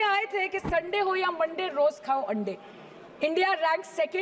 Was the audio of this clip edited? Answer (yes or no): no